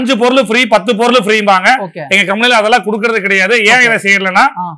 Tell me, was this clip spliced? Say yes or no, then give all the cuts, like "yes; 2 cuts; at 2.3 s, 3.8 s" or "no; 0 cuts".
no; 0 cuts